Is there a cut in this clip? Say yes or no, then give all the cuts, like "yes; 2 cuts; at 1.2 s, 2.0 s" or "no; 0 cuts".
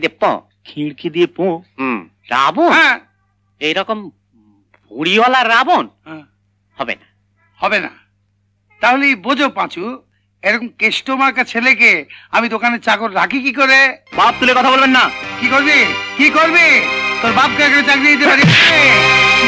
yes; 2 cuts; at 2.1 s, 14.0 s